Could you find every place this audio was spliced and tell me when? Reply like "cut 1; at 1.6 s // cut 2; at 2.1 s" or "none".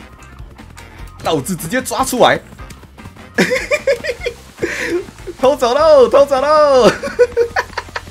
none